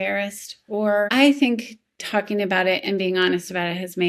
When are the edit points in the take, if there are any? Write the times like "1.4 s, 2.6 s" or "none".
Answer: 1.1 s